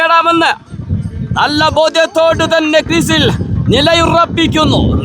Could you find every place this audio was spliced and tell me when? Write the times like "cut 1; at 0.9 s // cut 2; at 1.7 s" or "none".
none